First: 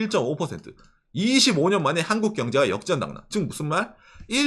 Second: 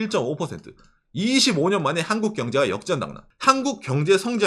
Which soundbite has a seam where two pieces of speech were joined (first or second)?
second